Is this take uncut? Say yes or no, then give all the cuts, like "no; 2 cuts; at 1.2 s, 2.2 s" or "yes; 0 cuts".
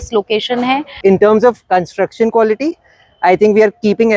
no; 1 cut; at 1.0 s